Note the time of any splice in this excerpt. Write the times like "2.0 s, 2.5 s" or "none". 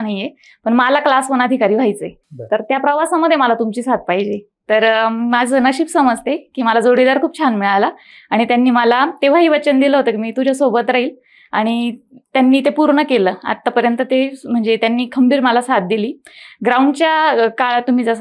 none